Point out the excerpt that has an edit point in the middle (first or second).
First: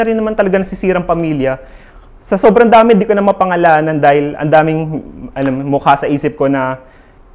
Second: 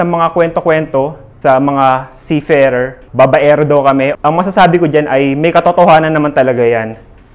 second